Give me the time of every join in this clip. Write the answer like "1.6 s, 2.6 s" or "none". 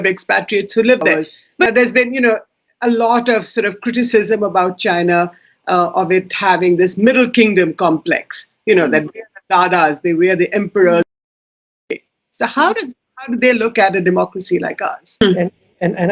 1.7 s, 15.2 s